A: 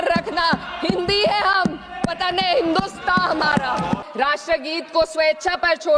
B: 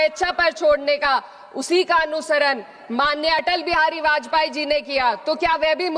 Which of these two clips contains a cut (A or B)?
A